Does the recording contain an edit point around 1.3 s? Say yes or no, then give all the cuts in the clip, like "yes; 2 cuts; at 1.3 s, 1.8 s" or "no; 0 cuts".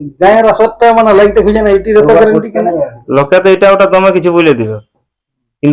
no; 1 cut; at 3.0 s